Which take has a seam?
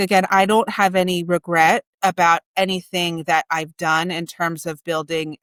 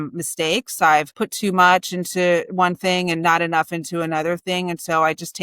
second; 1 cut; at 1.1 s

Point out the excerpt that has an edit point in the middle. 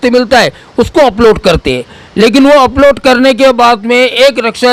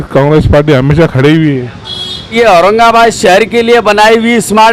second; 1 cut; at 2.3 s

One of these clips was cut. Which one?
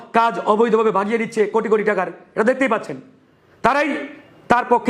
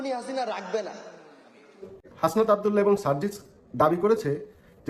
second; 1 cut; at 2.0 s

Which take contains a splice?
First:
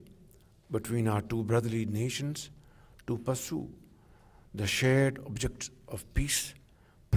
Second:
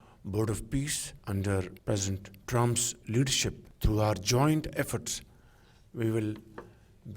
second; 2 cuts; at 1.1 s, 3.7 s

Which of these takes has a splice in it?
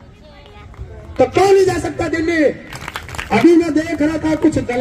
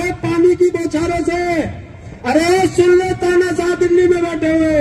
first; 1 cut; at 2.7 s

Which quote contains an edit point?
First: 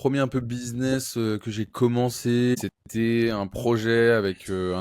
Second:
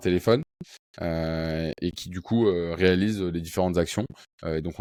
first; 1 cut; at 2.6 s

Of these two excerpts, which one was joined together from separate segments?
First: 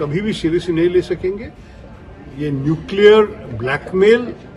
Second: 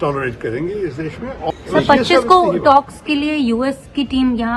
second; 1 cut; at 1.5 s

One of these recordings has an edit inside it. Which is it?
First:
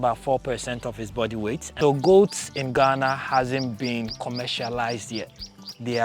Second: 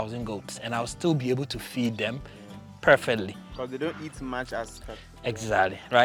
first; 1 cut; at 1.7 s

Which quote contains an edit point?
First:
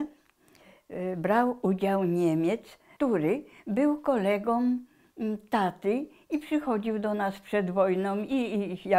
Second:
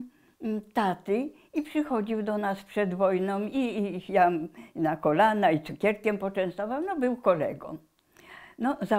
first; 1 cut; at 2.9 s

